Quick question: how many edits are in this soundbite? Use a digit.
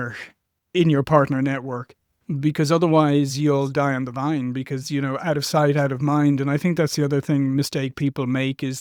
0